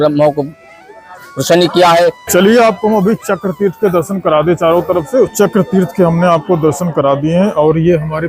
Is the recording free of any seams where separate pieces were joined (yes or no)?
no